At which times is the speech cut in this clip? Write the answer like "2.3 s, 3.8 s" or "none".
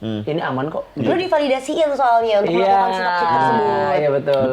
none